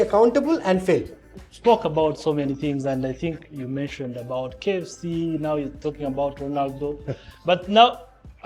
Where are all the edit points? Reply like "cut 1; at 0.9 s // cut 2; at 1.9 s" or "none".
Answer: cut 1; at 1.4 s // cut 2; at 3.5 s